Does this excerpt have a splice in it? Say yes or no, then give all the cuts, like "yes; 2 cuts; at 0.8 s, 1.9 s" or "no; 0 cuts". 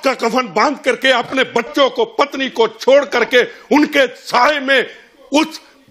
no; 0 cuts